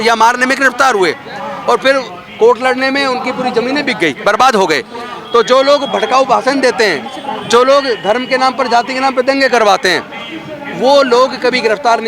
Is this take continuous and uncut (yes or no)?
yes